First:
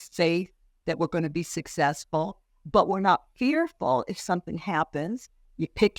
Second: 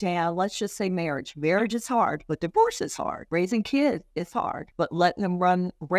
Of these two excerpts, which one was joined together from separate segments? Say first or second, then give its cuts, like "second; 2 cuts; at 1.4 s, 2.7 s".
second; 3 cuts; at 2.2 s, 3.2 s, 4.6 s